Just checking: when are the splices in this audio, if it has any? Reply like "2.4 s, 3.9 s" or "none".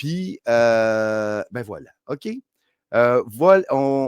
1.2 s